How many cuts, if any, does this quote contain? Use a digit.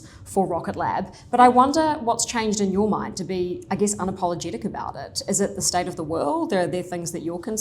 0